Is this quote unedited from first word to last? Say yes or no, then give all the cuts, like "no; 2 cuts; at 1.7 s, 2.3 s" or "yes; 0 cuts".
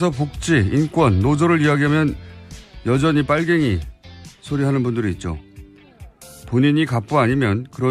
no; 1 cut; at 6.4 s